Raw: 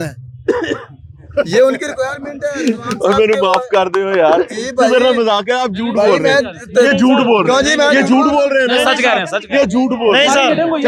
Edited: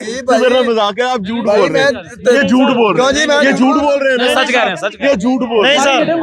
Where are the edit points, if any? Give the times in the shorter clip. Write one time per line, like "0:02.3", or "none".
none